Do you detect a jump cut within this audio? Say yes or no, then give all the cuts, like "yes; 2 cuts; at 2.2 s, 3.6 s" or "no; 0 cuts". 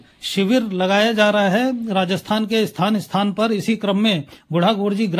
no; 0 cuts